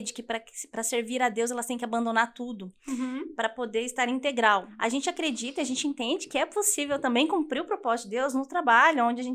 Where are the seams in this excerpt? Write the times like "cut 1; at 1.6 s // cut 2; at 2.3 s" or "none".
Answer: cut 1; at 4.7 s